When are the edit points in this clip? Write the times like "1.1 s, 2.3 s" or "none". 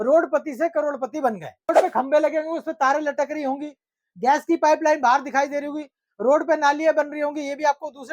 1.7 s